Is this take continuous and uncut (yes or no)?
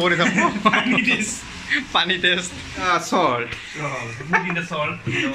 no